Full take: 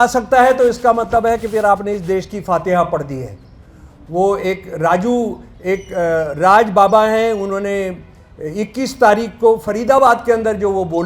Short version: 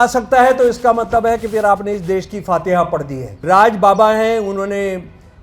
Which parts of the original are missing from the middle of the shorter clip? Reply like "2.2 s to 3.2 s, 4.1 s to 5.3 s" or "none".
3.4 s to 6.3 s